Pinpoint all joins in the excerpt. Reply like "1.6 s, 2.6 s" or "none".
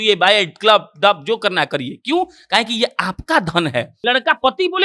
3.9 s